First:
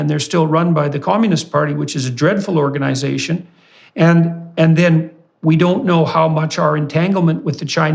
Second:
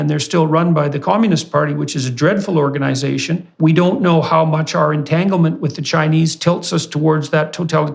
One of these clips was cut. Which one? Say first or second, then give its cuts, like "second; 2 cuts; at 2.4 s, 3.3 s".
second; 1 cut; at 3.4 s